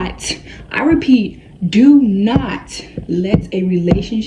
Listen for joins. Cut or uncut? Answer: uncut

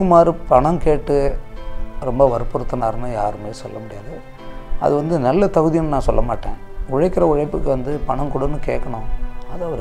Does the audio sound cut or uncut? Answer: uncut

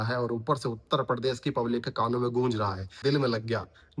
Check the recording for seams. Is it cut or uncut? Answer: cut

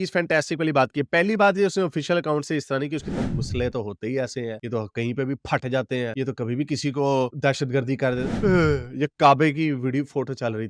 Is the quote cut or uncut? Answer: cut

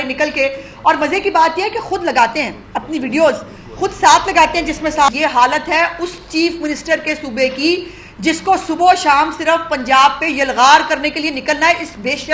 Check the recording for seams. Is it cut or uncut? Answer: cut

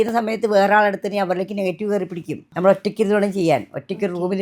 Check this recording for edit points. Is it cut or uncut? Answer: cut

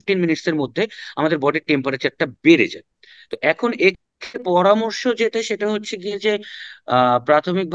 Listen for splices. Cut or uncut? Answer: uncut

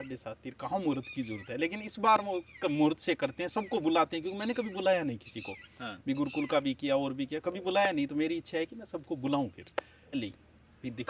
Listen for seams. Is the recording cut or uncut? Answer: cut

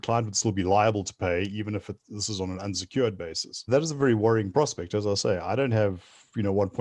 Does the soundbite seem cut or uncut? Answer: cut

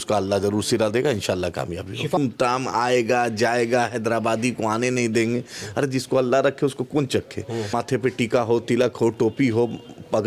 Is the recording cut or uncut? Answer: cut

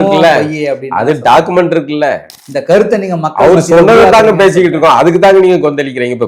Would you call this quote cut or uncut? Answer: cut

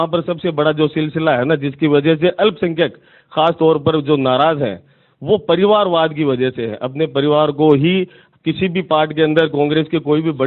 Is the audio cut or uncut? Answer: uncut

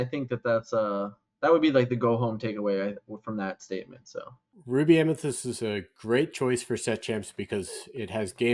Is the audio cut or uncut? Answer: cut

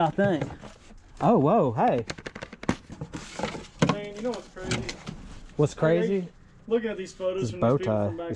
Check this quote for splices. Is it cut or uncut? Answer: cut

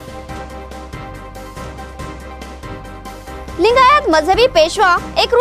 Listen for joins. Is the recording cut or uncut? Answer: uncut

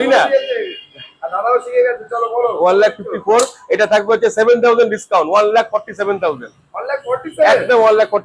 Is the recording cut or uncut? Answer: uncut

